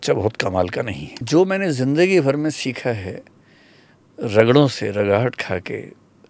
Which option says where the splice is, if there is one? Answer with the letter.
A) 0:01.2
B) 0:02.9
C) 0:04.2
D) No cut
A